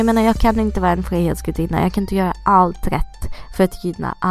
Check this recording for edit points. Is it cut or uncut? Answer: uncut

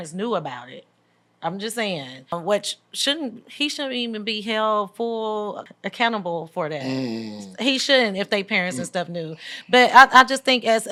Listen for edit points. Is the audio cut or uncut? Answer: uncut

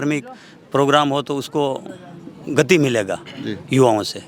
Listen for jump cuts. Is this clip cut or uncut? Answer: uncut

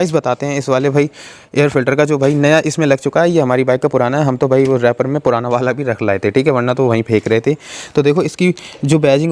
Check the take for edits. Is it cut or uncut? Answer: uncut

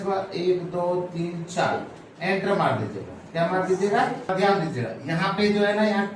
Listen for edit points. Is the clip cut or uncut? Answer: cut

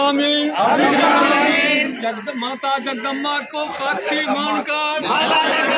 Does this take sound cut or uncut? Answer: uncut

